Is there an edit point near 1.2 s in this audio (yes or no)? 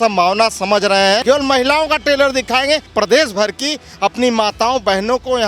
yes